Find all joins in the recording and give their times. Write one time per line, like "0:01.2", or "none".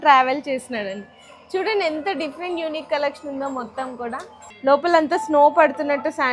0:04.4